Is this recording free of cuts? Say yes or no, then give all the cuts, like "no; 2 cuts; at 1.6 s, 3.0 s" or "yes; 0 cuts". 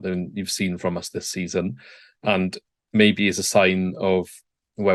yes; 0 cuts